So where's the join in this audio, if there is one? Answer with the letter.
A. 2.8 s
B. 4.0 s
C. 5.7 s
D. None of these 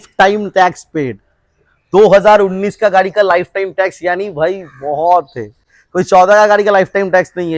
D